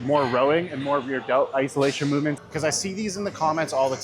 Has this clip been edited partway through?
yes; 1 cut; at 2.4 s

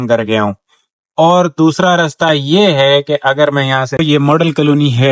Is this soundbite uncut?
no; 1 cut; at 4.0 s

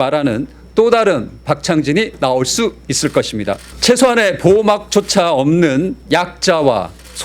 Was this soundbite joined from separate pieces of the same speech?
yes; 2 cuts; at 3.7 s, 6.0 s

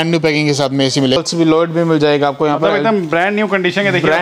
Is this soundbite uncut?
no; 1 cut; at 1.2 s

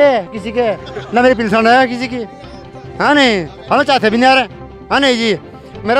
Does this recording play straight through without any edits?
yes; 0 cuts

